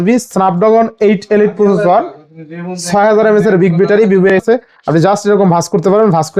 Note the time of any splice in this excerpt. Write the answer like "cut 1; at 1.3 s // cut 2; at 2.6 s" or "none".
cut 1; at 4.4 s